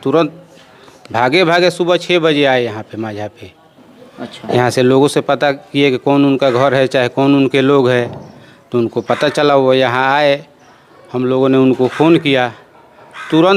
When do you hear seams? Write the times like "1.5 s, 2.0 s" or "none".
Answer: none